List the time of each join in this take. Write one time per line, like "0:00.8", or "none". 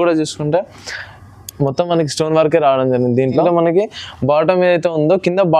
0:03.4

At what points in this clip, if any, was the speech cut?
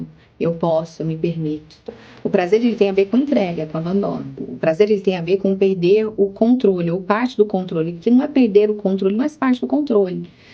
0:04.5

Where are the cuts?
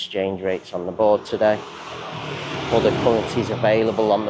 none

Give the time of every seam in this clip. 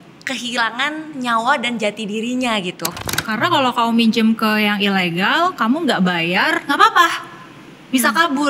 0:03.2

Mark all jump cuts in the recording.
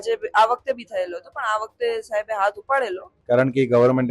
0:03.1

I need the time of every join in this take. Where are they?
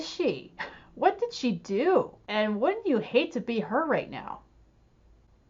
0:02.2

